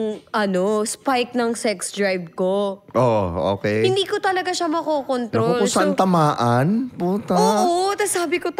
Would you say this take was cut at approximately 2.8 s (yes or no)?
no